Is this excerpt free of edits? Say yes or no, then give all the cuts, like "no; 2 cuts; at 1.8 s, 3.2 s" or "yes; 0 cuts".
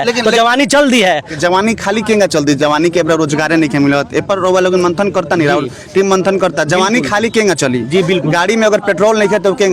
no; 1 cut; at 1.3 s